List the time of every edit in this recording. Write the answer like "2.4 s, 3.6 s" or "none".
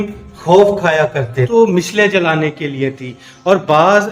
1.4 s